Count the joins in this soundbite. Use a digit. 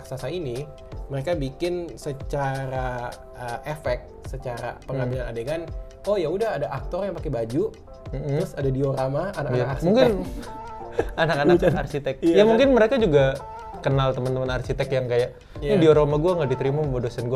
0